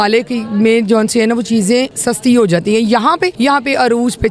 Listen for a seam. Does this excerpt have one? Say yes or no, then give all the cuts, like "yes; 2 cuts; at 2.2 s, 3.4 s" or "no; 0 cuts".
yes; 2 cuts; at 2.0 s, 3.3 s